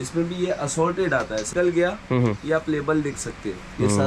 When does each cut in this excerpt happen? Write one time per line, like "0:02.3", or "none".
0:01.5